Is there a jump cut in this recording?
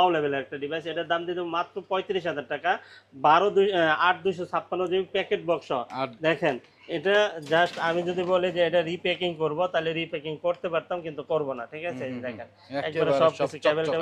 no; 0 cuts

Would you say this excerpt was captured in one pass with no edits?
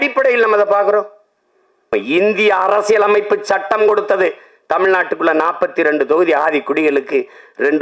no; 1 cut; at 1.9 s

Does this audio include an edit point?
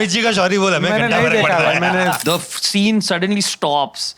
yes; 1 cut; at 2.2 s

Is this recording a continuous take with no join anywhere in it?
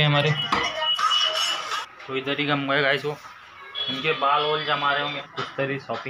no; 2 cuts; at 1.8 s, 5.2 s

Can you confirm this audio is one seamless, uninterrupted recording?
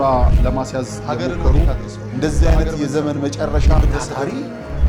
yes; 0 cuts

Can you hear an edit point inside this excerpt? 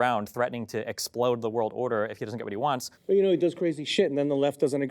yes; 1 cut; at 2.9 s

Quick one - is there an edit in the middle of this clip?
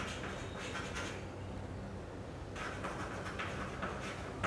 yes; 1 cut; at 2.6 s

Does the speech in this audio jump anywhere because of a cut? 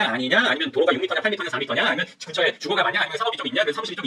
no; 0 cuts

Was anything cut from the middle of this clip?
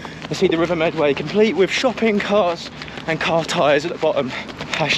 no; 0 cuts

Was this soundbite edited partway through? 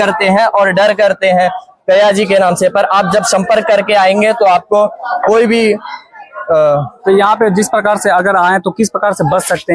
no; 0 cuts

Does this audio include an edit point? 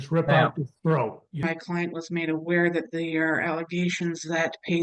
yes; 1 cut; at 1.5 s

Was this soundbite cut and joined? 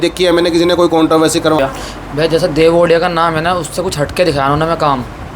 yes; 1 cut; at 1.6 s

